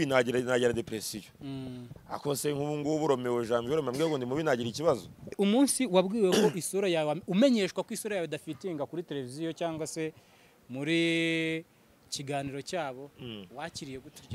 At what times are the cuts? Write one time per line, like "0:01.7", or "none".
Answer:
0:05.4